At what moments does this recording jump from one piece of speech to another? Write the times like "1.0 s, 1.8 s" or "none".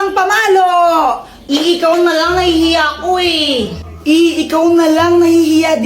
1.5 s